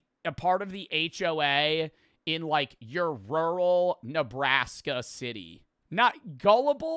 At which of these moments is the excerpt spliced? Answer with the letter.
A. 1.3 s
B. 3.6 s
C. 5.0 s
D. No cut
B